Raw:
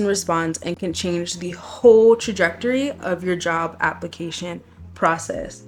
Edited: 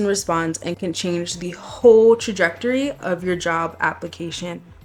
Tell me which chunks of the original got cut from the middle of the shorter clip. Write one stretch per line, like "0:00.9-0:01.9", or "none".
none